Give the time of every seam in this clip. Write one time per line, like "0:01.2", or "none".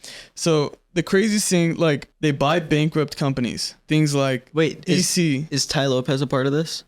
0:02.1
0:03.8